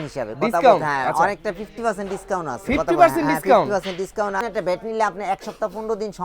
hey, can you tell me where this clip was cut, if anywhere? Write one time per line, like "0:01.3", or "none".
0:04.4

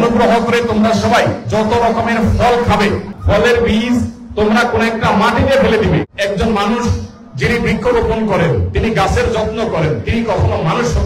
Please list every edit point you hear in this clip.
0:03.1
0:06.1

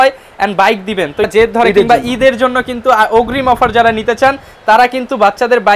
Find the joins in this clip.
0:01.3

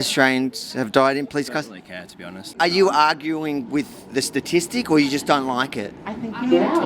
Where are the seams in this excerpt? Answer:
0:02.6

